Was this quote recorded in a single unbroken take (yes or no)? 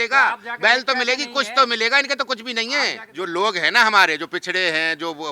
no